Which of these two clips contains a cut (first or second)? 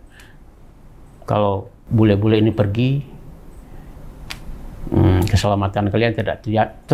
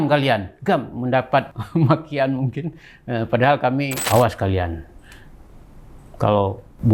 second